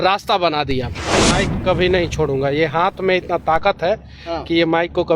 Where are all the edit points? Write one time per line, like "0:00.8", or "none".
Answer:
0:01.2